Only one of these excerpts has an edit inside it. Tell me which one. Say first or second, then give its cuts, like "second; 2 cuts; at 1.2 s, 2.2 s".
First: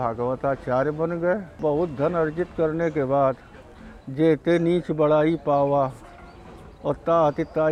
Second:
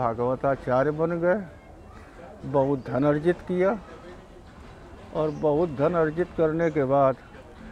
first; 1 cut; at 1.5 s